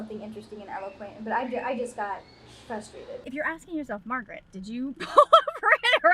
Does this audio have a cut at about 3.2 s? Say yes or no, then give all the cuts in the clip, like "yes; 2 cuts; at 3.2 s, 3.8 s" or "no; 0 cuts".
yes; 1 cut; at 3.2 s